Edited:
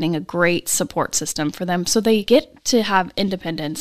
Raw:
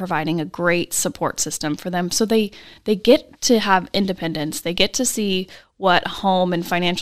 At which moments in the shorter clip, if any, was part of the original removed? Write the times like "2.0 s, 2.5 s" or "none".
2.2 s